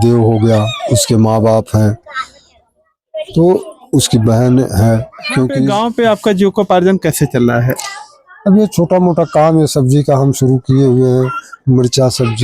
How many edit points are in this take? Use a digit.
1